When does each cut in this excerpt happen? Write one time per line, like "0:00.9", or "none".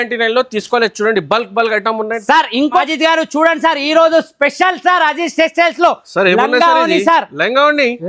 0:02.8